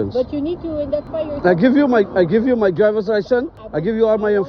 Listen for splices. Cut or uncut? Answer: uncut